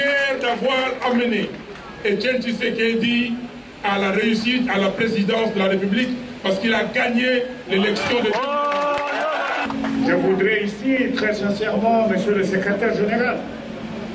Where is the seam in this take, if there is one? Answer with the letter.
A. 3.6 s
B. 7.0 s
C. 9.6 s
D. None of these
C